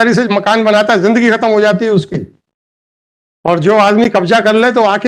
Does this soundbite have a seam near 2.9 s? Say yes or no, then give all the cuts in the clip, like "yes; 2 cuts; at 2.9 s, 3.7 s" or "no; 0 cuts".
no; 0 cuts